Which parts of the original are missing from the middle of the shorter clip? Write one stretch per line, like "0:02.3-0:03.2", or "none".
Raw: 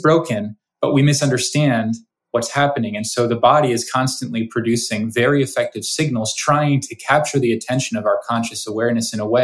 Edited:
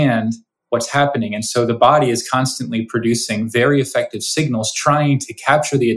none